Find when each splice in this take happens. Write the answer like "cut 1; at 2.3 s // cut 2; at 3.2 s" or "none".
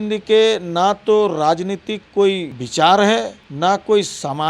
cut 1; at 2.6 s // cut 2; at 3.4 s